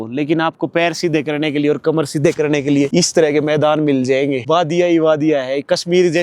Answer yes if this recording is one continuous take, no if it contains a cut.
yes